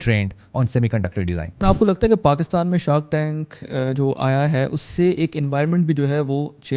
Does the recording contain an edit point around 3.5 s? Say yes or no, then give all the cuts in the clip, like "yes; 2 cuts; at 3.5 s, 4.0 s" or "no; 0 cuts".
no; 1 cut; at 1.6 s